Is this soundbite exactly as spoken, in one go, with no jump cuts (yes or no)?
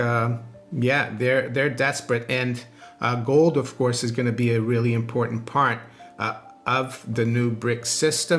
yes